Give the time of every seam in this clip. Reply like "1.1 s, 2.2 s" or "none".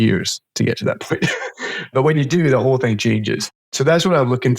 1.9 s, 3.7 s